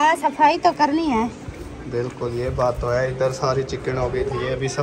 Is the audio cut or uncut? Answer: uncut